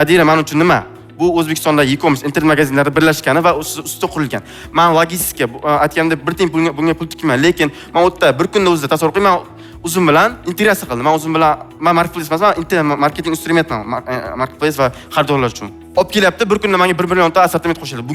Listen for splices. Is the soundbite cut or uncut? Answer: uncut